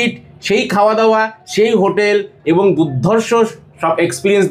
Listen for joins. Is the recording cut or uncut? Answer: uncut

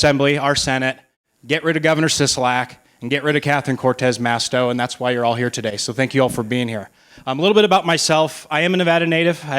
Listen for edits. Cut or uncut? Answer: uncut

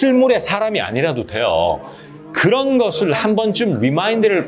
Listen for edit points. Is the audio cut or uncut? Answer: uncut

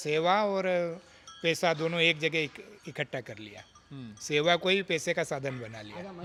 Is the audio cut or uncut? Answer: uncut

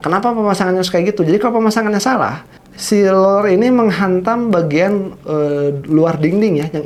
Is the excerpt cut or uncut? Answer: uncut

